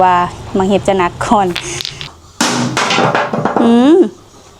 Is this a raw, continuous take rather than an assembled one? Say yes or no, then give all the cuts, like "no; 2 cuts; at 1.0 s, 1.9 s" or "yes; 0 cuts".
no; 1 cut; at 2.1 s